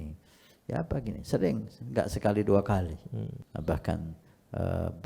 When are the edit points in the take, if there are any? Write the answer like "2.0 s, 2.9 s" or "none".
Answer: 3.4 s